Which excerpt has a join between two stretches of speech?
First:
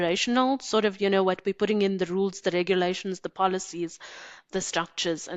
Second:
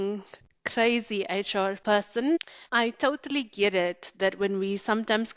second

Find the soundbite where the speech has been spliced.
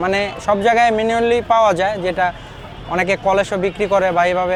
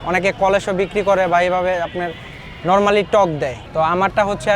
second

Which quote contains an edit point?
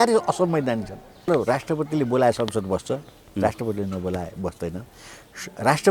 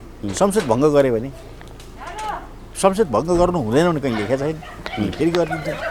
first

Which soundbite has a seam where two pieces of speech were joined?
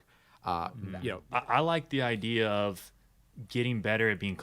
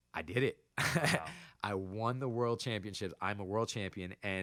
first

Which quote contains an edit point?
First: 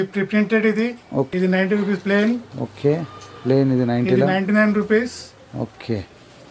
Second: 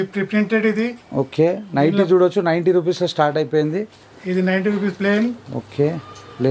first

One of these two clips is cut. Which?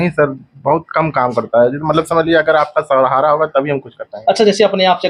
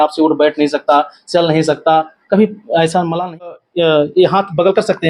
second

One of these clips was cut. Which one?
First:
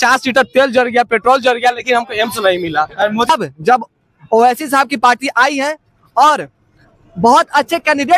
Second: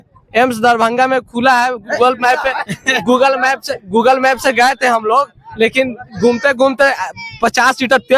first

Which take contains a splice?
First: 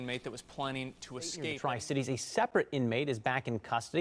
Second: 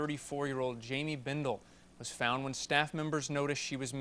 first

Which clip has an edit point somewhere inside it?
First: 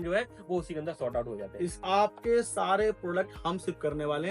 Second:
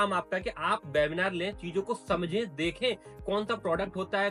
first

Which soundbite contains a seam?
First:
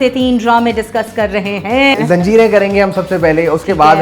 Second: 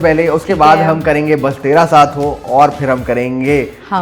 first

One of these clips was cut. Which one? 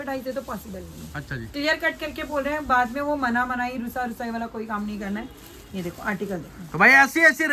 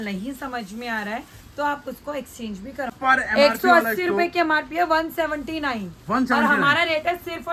second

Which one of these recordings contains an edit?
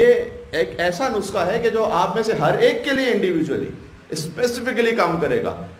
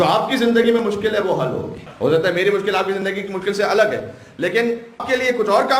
second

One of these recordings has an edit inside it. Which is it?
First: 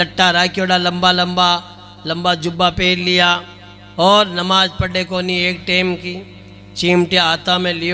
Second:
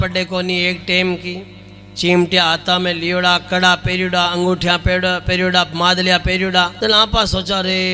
second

